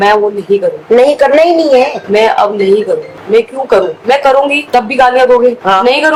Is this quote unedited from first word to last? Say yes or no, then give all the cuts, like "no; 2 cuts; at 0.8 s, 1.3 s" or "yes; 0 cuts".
yes; 0 cuts